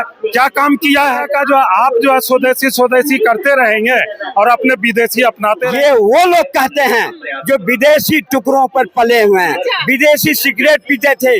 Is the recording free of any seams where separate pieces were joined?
no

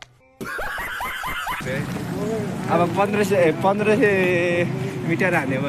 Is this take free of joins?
no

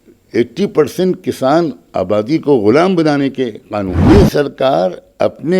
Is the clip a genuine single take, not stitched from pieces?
no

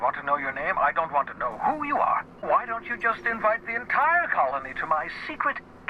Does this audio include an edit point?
yes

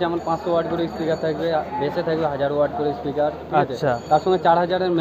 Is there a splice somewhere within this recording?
no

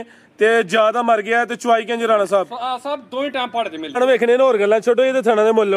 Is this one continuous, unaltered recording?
no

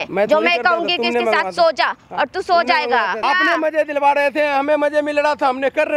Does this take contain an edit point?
yes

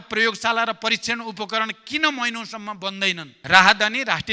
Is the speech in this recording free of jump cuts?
no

